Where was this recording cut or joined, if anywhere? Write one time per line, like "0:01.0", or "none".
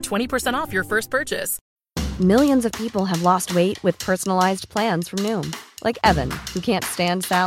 0:01.6